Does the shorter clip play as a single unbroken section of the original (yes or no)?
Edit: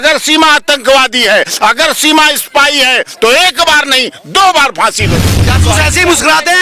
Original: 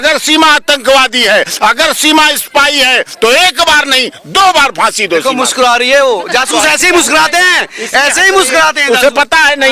no